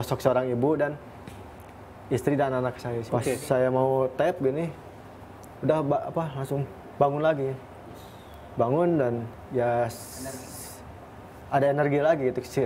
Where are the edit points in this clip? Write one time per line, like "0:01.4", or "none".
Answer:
0:03.1